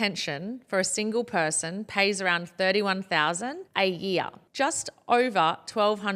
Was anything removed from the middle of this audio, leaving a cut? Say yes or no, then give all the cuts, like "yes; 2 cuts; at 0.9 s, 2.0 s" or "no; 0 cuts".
no; 0 cuts